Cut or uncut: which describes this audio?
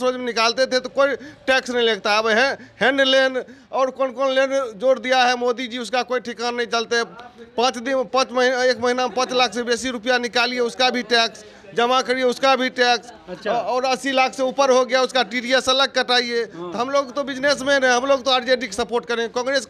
uncut